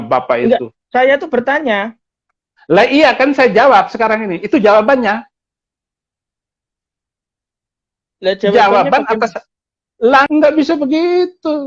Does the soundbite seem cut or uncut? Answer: cut